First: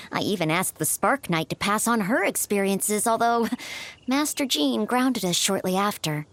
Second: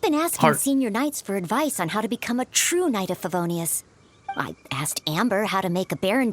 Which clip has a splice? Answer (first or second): second